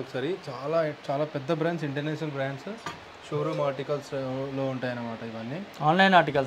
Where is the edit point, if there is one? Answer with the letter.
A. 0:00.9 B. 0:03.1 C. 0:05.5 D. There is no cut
D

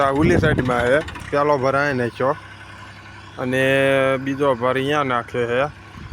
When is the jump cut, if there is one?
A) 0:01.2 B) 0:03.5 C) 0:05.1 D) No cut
A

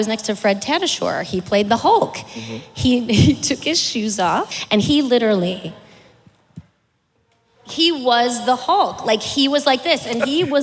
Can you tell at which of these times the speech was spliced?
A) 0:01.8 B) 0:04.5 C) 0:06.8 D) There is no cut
B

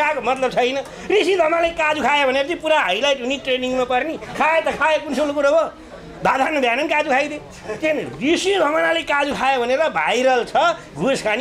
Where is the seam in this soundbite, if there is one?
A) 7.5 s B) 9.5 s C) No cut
C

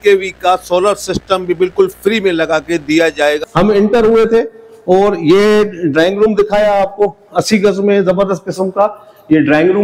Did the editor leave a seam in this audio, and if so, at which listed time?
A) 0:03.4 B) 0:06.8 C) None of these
A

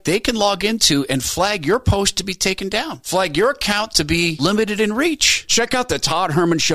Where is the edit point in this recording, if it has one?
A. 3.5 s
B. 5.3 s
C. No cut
B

